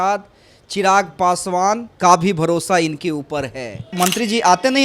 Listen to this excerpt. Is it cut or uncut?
cut